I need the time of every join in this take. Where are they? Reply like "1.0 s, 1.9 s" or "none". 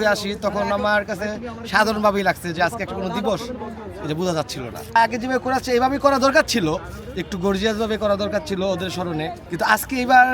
5.0 s, 9.4 s